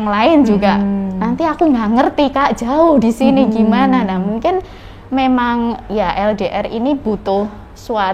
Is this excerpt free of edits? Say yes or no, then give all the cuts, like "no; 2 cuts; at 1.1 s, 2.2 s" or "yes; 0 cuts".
yes; 0 cuts